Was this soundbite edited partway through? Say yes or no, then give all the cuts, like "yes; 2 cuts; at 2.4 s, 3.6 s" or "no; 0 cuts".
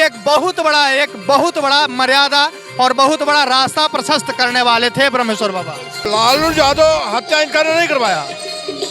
yes; 1 cut; at 6.1 s